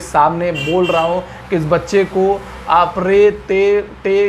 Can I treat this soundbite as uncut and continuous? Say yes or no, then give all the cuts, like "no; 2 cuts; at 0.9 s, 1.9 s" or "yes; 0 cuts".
yes; 0 cuts